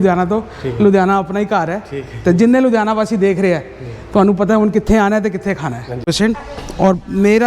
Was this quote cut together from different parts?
yes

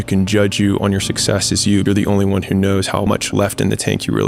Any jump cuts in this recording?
yes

